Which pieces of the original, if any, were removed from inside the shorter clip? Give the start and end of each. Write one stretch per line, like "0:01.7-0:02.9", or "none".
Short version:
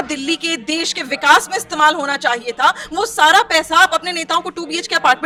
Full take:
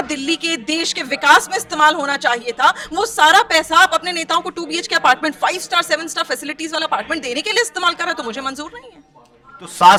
none